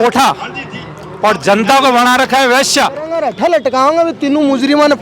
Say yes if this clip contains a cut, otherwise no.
yes